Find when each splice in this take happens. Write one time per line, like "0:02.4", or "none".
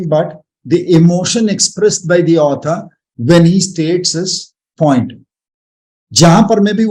none